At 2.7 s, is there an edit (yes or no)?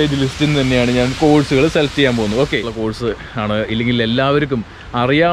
yes